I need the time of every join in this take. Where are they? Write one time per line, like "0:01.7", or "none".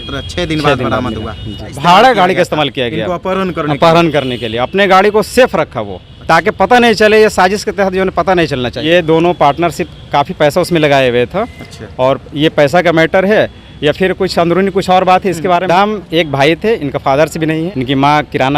0:01.7
0:08.8
0:15.7
0:17.6

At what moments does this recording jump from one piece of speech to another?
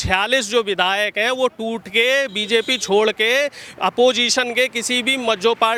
none

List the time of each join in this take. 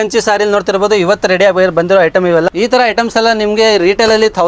0:02.5

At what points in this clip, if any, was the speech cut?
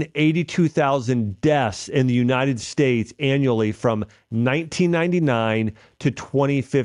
none

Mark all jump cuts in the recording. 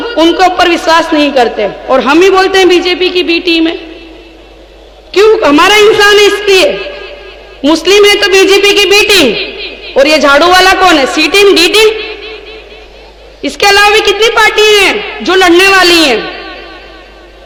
none

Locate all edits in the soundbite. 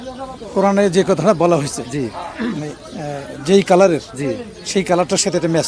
none

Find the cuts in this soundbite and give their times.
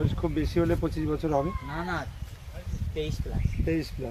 none

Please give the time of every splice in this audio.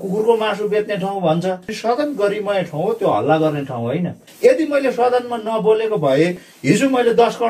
0:01.7
0:04.2
0:06.5

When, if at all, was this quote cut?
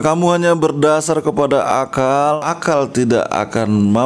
0:02.4

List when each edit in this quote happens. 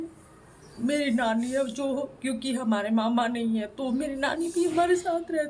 none

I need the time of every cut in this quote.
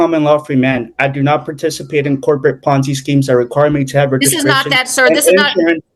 none

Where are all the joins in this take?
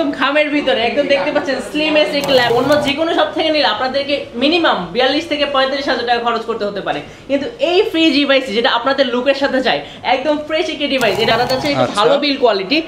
0:02.5
0:11.3

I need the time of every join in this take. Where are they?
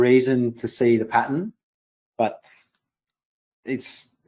none

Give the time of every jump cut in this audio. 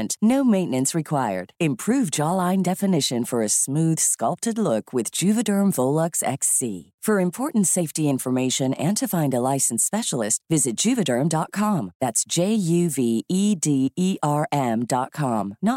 none

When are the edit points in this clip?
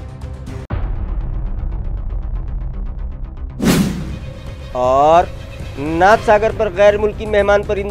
none

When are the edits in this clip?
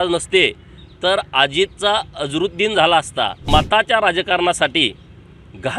0:03.4

